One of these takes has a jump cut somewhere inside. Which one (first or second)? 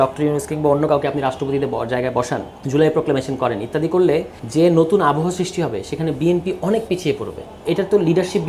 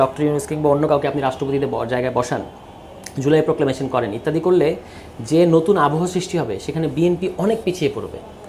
first